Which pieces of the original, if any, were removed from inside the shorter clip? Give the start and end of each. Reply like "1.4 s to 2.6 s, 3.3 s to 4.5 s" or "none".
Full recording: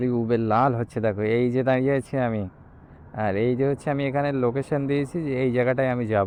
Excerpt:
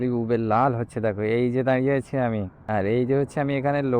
2.5 s to 3.0 s